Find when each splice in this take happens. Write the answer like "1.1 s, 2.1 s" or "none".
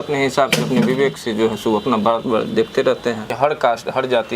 3.3 s